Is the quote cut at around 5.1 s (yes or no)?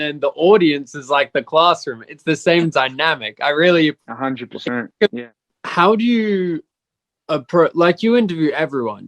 yes